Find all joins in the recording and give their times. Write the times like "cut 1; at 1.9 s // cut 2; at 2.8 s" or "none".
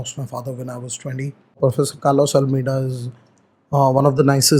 cut 1; at 1.6 s